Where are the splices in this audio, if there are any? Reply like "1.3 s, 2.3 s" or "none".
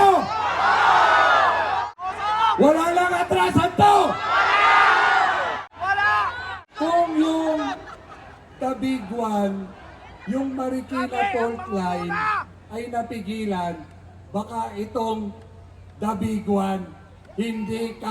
1.9 s, 5.7 s, 6.6 s